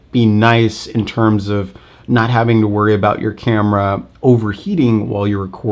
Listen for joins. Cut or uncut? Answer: uncut